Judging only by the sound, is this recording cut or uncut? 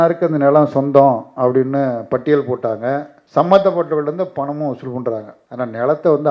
cut